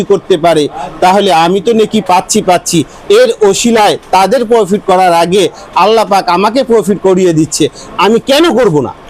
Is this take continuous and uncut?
yes; 0 cuts

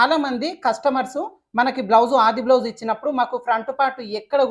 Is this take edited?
no; 0 cuts

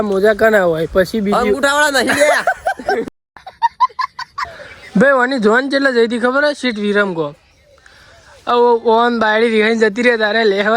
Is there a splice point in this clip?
yes; 1 cut; at 4.2 s

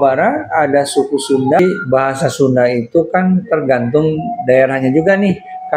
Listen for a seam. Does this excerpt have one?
yes; 1 cut; at 1.6 s

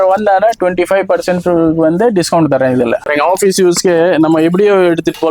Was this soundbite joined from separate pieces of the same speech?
yes; 1 cut; at 3.0 s

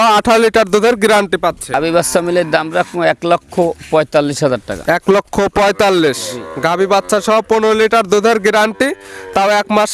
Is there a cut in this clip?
yes; 1 cut; at 1.8 s

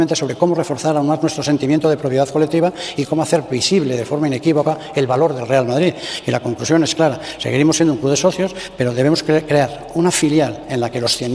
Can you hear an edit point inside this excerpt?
no; 0 cuts

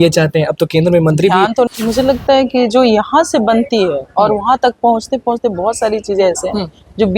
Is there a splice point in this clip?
yes; 1 cut; at 1.7 s

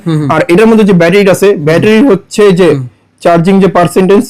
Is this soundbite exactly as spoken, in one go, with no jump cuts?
yes; 0 cuts

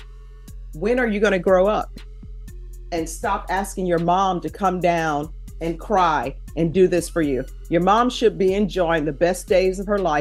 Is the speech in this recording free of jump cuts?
yes; 0 cuts

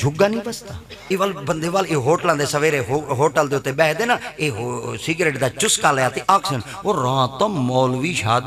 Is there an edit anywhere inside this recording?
yes; 1 cut; at 1.0 s

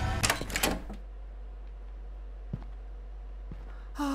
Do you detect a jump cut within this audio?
no; 0 cuts

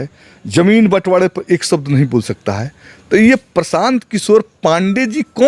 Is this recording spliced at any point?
no; 0 cuts

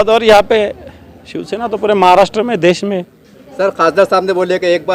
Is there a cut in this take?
no; 0 cuts

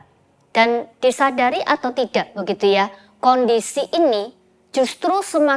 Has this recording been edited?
no; 0 cuts

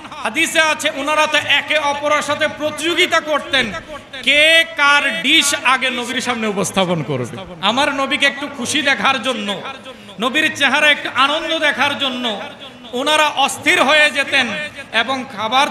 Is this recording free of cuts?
no; 1 cut; at 7.4 s

